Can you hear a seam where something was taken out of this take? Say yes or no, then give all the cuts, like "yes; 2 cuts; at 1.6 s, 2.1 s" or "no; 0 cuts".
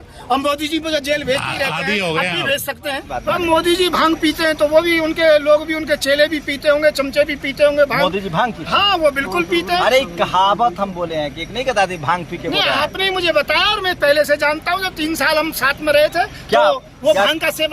yes; 1 cut; at 3.1 s